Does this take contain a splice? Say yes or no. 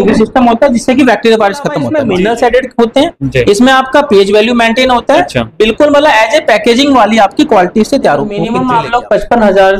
yes